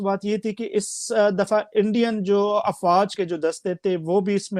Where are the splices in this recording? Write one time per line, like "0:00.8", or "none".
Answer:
0:03.1